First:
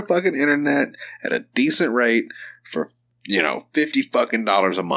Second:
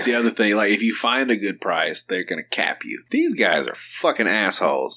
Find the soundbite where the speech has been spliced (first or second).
second